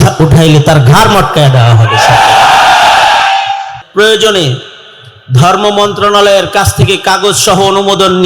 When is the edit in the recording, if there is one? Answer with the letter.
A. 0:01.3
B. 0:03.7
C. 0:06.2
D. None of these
B